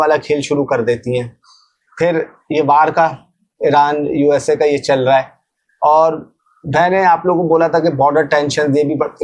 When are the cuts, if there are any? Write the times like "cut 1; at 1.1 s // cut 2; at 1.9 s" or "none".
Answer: none